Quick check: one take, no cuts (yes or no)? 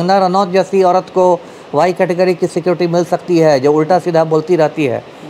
yes